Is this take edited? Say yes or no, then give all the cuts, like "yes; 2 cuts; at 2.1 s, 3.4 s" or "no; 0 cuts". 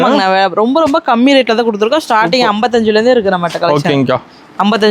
no; 0 cuts